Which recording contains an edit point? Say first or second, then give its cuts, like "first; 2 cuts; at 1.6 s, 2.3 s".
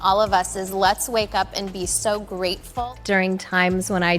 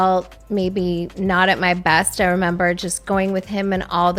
first; 1 cut; at 2.6 s